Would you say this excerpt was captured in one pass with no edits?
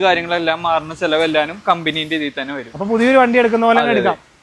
yes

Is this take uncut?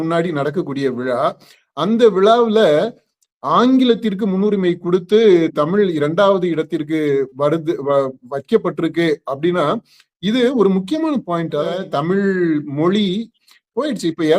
no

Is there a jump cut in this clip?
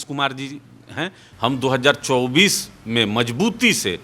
yes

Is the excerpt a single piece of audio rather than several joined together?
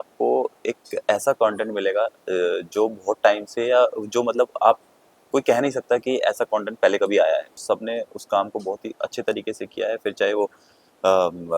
no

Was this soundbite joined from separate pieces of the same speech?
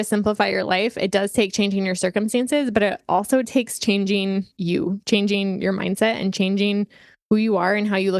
no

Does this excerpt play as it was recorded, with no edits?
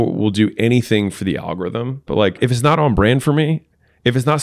no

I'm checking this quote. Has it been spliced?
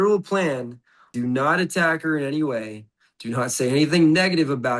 yes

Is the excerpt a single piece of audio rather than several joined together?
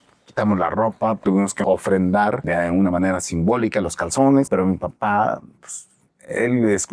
no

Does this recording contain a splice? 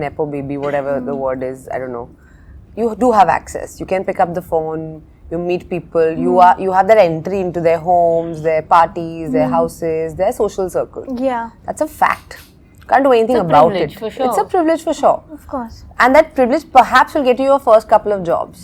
no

